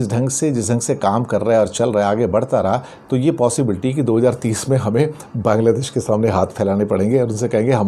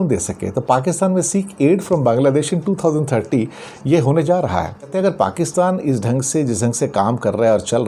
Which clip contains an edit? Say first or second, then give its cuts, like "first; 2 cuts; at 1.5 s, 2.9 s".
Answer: second; 1 cut; at 4.9 s